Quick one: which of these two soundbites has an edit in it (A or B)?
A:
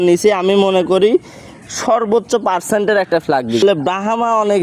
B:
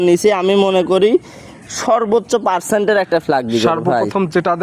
A